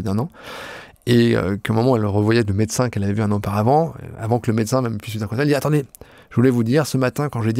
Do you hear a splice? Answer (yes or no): no